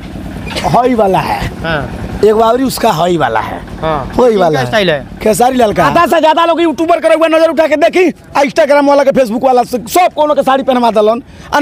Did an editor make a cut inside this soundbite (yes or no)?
yes